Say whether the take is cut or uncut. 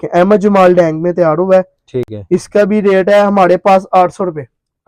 uncut